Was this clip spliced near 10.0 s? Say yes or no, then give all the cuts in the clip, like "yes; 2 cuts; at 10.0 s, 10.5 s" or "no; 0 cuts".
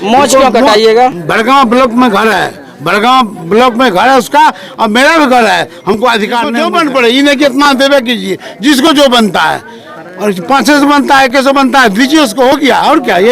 no; 1 cut; at 6.5 s